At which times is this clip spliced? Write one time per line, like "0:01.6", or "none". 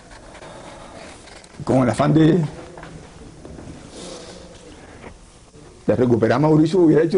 0:01.3